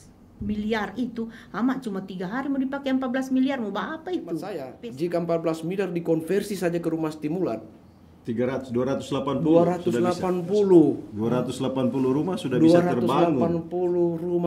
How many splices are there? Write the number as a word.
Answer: one